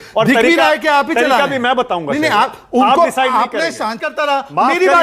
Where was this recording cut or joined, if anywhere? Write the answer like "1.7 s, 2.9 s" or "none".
4.0 s